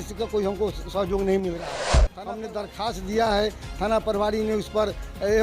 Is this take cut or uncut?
cut